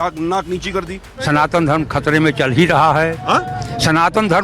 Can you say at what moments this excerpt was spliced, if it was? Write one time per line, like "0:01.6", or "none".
0:01.2